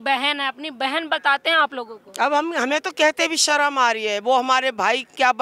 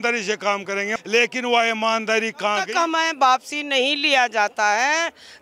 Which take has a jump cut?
second; 2 cuts; at 0.9 s, 2.6 s

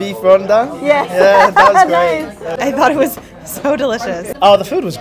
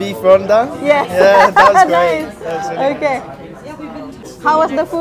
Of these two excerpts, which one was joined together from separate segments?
first; 2 cuts; at 2.6 s, 4.2 s

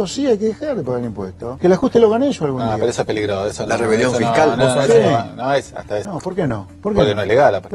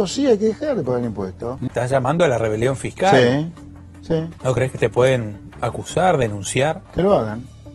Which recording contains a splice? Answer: second; 3 cuts; at 1.4 s, 4.3 s, 6.8 s

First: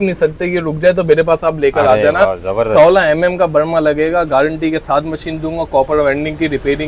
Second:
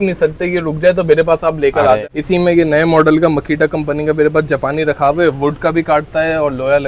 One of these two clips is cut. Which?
second; 1 cut; at 2.0 s

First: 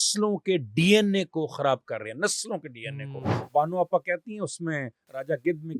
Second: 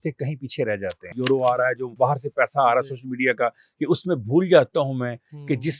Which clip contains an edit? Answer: second; 2 cuts; at 1.1 s, 1.9 s

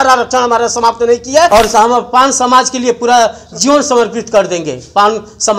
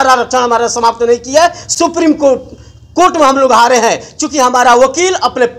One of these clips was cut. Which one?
first; 1 cut; at 1.5 s

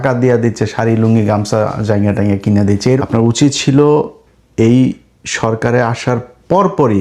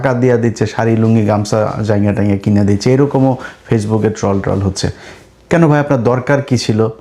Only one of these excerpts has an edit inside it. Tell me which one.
first; 1 cut; at 3.0 s

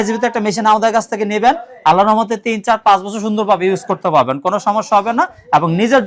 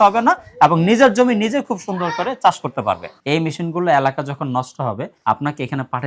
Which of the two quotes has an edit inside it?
second; 2 cuts; at 3.1 s, 5.1 s

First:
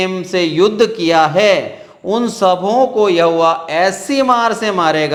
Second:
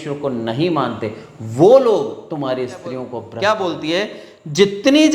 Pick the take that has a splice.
second; 1 cut; at 3.2 s

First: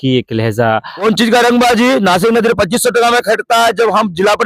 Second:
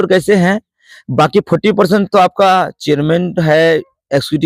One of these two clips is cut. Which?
first; 1 cut; at 1.0 s

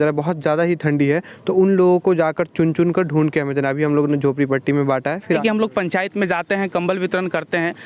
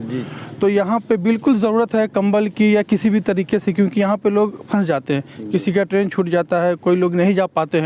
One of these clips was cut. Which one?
first; 1 cut; at 5.4 s

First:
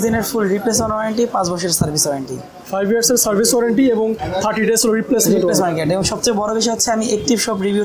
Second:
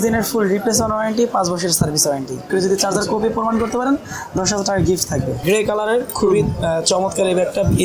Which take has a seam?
second; 2 cuts; at 2.4 s, 5.3 s

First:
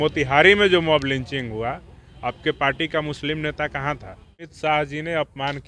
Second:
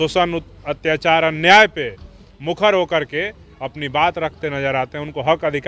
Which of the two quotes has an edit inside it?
first; 1 cut; at 4.5 s

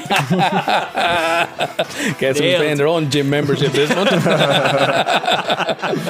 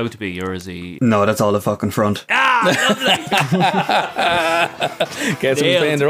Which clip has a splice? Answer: second; 2 cuts; at 0.9 s, 2.2 s

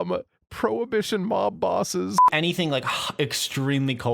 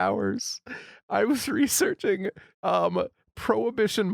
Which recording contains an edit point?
first; 1 cut; at 2.2 s

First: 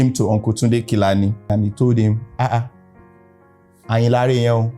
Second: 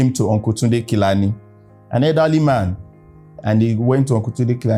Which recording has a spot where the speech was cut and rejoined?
first; 1 cut; at 1.5 s

